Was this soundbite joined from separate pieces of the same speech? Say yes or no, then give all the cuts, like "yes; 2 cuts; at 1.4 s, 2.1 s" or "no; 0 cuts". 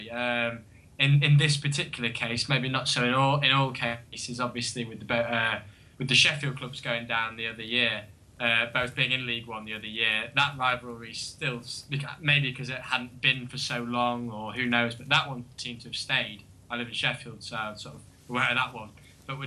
yes; 1 cut; at 8.9 s